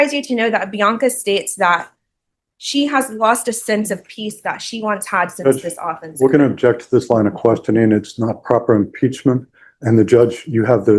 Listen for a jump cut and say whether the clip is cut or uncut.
uncut